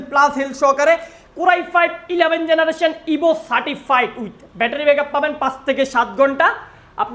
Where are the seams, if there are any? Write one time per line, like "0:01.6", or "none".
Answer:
none